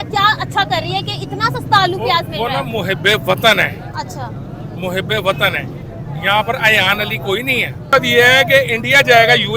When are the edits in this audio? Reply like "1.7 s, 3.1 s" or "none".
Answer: 7.9 s